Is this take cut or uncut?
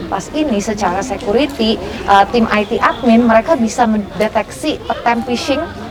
uncut